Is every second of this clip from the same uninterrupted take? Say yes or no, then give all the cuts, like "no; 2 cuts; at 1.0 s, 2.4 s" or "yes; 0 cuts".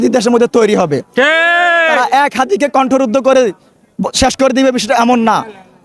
yes; 0 cuts